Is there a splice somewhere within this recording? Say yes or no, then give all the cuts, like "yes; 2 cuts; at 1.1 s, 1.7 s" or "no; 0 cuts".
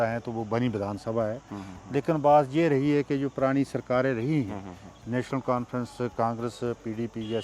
no; 0 cuts